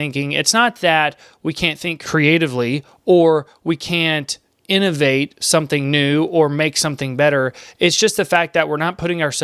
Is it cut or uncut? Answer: cut